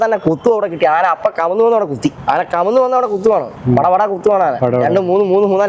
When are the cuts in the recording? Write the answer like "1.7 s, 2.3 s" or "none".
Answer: 2.2 s